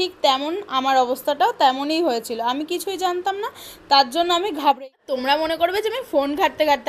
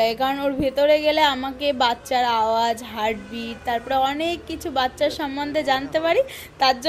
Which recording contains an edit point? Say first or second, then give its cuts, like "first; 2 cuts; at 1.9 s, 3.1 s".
first; 1 cut; at 4.8 s